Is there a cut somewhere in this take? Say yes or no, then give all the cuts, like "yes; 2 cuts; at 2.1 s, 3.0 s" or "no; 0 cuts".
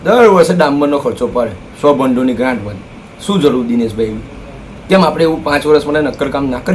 no; 0 cuts